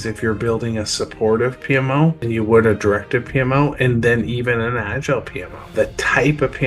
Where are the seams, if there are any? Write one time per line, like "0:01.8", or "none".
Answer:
0:02.3
0:05.7